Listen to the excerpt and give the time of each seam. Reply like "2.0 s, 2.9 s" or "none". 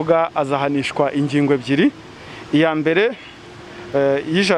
none